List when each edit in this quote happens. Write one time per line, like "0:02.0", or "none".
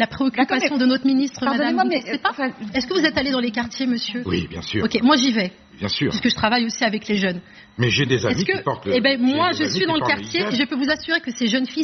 0:02.7